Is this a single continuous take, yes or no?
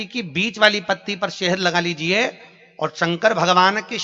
yes